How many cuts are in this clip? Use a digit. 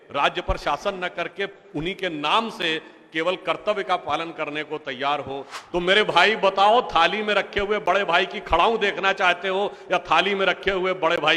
1